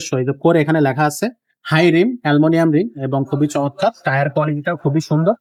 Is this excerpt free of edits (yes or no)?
yes